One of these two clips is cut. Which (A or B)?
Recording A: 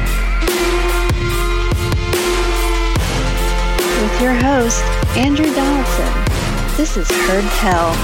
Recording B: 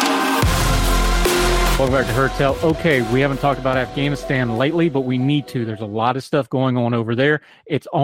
B